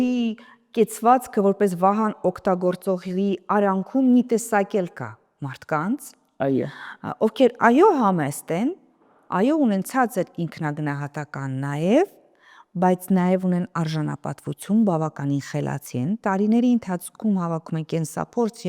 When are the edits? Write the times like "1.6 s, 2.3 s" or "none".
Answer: none

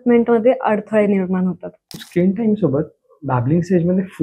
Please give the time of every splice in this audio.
2.0 s

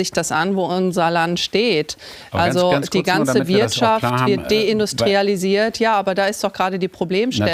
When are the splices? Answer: none

